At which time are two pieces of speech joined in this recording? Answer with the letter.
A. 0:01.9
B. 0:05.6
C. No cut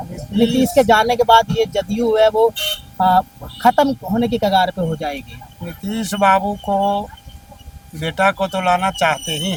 C